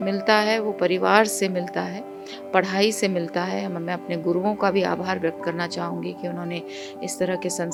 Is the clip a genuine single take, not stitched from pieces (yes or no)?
yes